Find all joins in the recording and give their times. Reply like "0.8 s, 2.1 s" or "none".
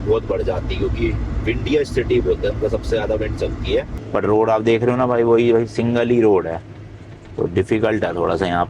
4.0 s